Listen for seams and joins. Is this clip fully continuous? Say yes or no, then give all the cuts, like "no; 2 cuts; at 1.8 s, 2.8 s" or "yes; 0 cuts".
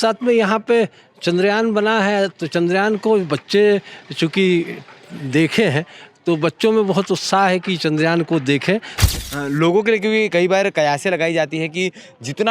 no; 1 cut; at 8.9 s